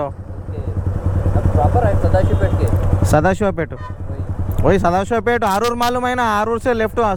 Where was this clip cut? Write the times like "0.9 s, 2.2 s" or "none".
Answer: none